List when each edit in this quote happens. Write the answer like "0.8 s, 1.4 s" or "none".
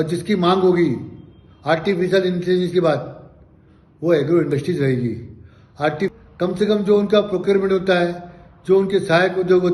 6.1 s